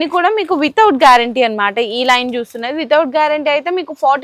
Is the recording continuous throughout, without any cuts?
yes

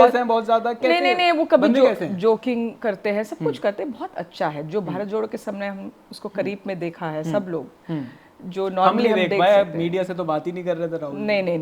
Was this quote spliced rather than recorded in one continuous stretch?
no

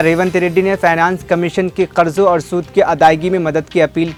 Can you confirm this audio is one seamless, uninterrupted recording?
yes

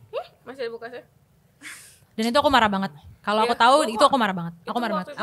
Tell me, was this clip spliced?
no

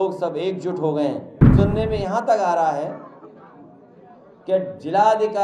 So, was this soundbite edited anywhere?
yes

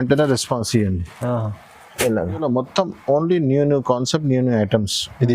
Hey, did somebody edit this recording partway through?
yes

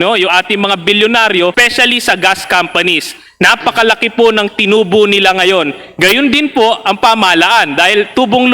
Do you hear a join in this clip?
yes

